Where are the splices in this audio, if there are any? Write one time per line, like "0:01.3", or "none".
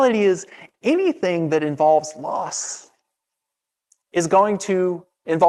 none